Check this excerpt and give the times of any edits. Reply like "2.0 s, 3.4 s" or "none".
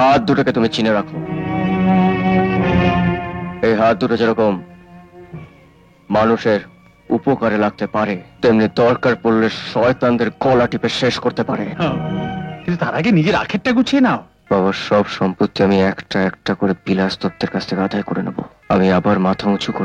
8.3 s, 14.3 s, 18.5 s